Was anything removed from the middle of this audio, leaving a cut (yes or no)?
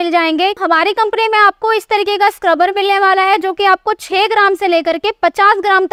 no